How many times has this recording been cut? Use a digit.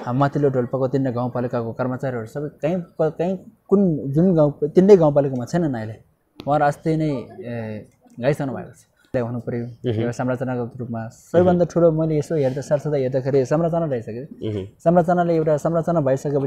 1